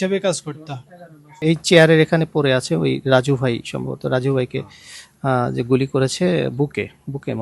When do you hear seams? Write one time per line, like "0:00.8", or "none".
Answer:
0:01.4